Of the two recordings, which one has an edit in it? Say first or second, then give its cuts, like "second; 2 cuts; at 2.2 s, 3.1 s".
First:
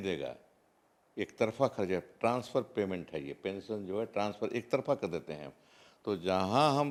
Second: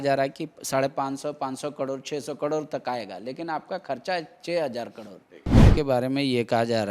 second; 1 cut; at 5.6 s